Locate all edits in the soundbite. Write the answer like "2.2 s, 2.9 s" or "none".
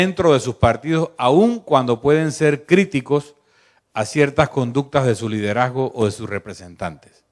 none

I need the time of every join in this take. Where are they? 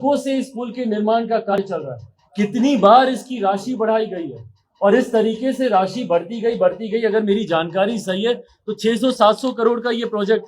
1.6 s

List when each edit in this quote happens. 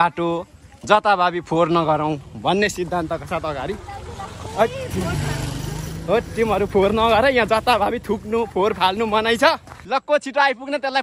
9.7 s

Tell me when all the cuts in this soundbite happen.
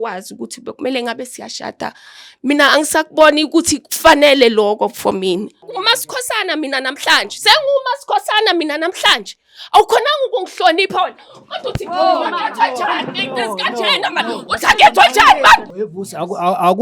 5.7 s, 15.7 s

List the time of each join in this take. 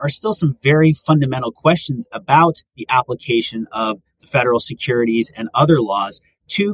none

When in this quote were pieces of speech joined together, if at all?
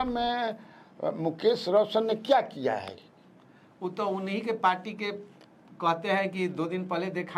none

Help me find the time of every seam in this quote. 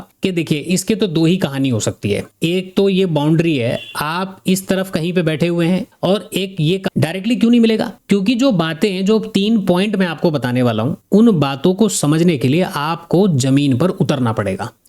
6.9 s

